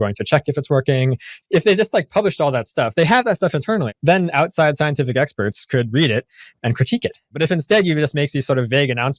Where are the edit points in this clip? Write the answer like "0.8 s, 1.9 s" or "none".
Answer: 1.4 s, 3.9 s, 7.3 s